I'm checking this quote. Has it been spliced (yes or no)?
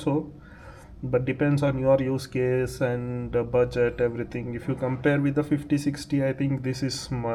no